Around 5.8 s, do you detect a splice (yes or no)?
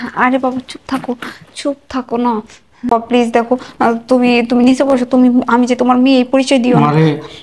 no